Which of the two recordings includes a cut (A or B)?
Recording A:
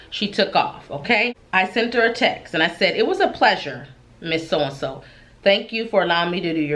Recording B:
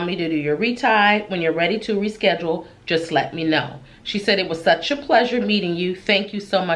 A